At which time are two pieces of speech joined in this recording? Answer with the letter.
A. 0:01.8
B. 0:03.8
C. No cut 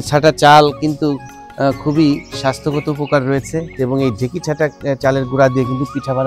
B